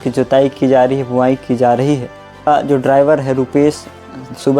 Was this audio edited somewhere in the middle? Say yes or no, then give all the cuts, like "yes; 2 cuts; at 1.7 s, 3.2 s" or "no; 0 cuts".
yes; 1 cut; at 2.5 s